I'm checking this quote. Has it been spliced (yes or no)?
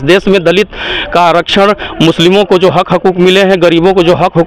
no